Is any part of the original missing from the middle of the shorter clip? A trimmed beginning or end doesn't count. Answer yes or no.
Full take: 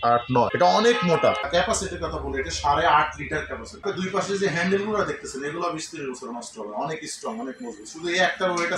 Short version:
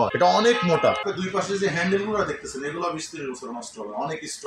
yes